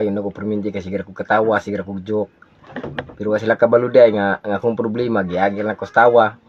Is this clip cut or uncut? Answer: uncut